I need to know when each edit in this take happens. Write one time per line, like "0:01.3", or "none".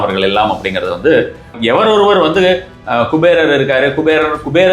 0:01.6